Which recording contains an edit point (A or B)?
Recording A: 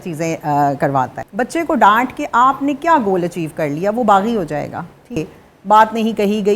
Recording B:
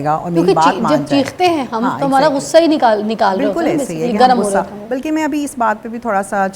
A